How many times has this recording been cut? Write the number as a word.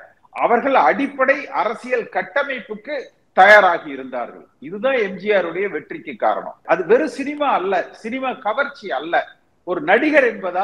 one